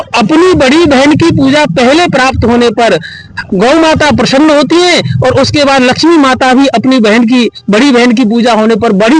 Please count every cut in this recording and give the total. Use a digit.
0